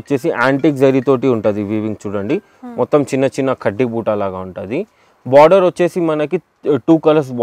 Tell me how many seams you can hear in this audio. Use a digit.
0